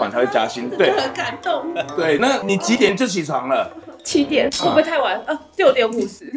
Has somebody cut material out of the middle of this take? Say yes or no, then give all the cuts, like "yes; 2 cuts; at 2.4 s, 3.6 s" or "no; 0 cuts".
no; 0 cuts